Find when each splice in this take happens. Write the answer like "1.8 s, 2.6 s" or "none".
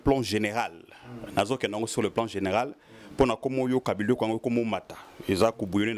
none